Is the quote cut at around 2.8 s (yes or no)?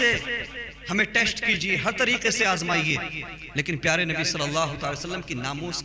no